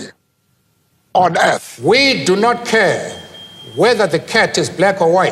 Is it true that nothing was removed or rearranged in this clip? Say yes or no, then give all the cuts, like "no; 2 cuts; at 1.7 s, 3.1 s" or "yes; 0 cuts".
no; 1 cut; at 1.7 s